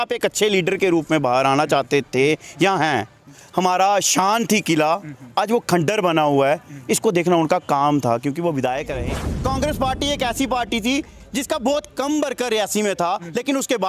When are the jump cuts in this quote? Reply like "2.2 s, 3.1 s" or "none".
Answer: 3.4 s, 9.1 s